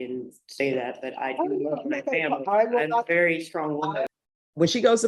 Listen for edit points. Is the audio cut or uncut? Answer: cut